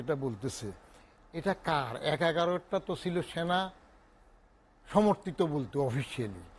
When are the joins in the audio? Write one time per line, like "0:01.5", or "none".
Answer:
none